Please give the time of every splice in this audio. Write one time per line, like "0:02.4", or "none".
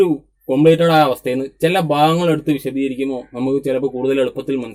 none